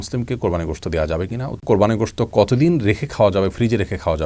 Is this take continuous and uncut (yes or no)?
no